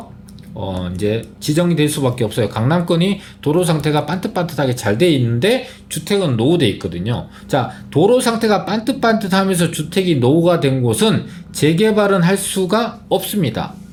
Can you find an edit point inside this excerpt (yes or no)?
no